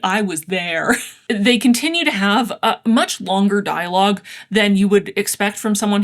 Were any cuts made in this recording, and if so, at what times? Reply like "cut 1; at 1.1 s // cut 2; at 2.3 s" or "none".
cut 1; at 1.2 s

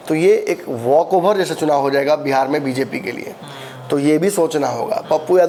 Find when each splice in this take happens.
none

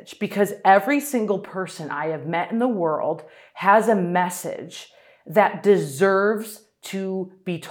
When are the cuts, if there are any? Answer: none

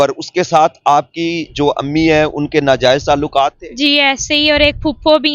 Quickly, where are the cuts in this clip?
none

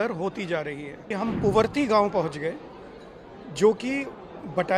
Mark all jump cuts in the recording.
cut 1; at 1.1 s

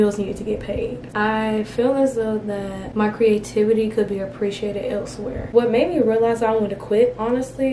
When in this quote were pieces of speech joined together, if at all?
cut 1; at 1.0 s // cut 2; at 2.8 s // cut 3; at 5.4 s

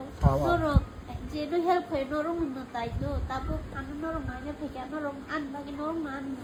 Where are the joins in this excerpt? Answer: none

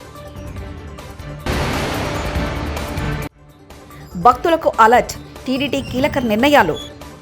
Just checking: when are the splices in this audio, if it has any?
cut 1; at 1.4 s // cut 2; at 3.4 s

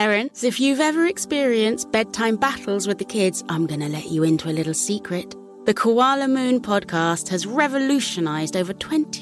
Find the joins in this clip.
none

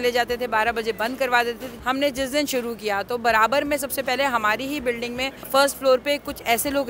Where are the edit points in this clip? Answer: cut 1; at 1.7 s // cut 2; at 5.5 s

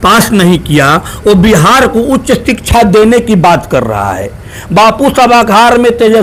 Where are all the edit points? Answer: none

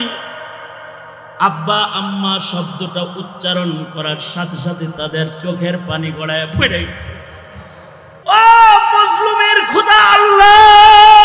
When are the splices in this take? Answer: cut 1; at 8.1 s

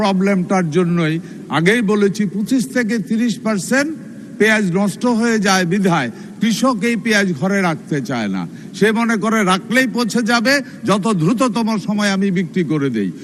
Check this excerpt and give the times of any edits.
none

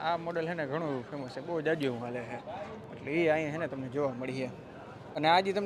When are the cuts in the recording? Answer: none

